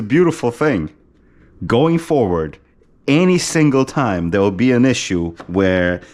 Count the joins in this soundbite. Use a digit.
0